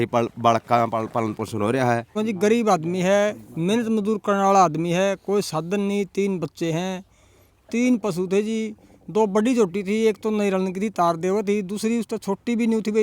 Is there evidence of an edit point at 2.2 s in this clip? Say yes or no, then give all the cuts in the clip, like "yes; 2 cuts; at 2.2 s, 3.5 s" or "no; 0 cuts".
yes; 1 cut; at 2.2 s